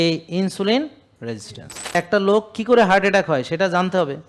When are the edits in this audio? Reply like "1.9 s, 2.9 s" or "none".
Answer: 1.9 s